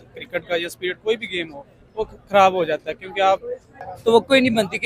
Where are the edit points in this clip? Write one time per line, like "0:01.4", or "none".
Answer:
0:03.8